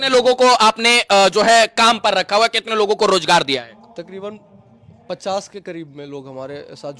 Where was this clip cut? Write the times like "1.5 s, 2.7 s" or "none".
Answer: none